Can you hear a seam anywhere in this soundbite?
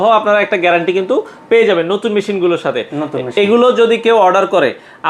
no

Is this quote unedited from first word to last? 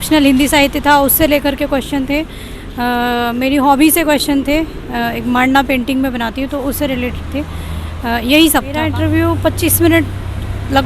no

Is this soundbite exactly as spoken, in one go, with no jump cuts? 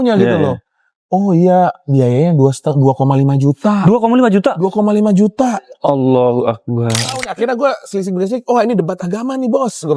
no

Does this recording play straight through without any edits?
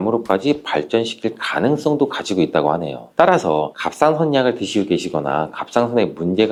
yes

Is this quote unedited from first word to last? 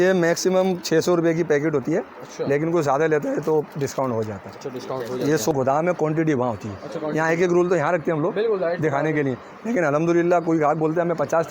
no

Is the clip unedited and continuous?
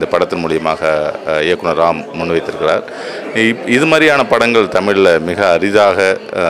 yes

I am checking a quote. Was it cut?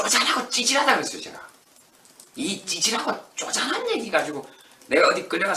yes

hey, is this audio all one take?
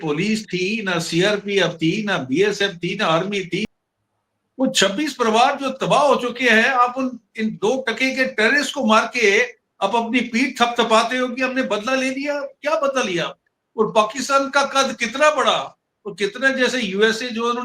no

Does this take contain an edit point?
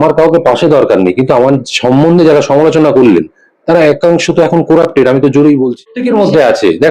yes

